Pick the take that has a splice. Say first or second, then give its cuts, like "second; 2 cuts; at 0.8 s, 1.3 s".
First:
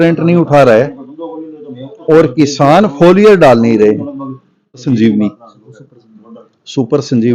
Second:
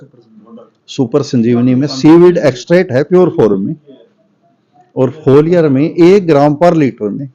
first; 1 cut; at 4.8 s